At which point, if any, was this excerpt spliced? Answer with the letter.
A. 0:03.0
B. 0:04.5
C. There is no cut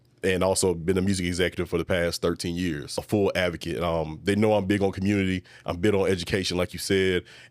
A